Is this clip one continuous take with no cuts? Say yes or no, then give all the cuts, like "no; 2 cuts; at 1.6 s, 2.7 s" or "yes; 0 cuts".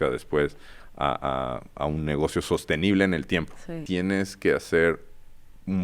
no; 1 cut; at 3.8 s